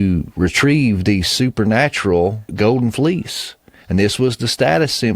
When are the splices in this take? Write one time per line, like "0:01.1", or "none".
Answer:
0:02.4